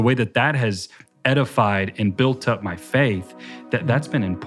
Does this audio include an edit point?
no; 0 cuts

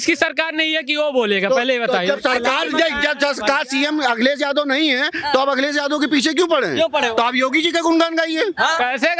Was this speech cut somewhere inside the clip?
no; 0 cuts

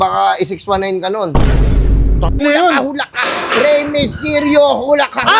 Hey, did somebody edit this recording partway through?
yes; 1 cut; at 2.4 s

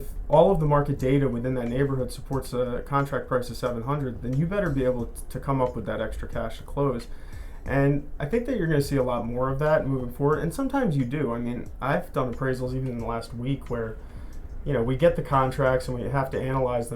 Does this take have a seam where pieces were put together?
no; 0 cuts

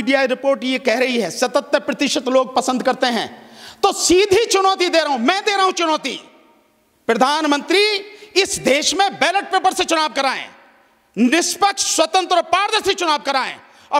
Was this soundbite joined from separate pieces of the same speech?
no; 0 cuts

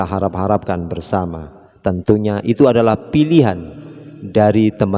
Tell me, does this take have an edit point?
no; 0 cuts

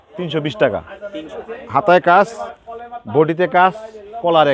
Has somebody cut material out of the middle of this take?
yes; 1 cut; at 1.2 s

